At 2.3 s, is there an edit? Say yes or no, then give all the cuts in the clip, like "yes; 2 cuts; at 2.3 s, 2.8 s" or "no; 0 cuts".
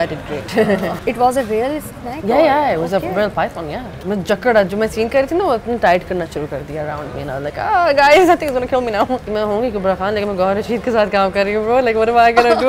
no; 3 cuts; at 1.0 s, 3.9 s, 9.3 s